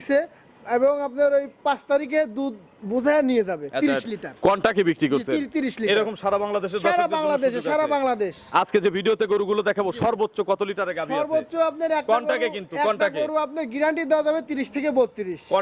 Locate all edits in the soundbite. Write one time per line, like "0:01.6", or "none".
none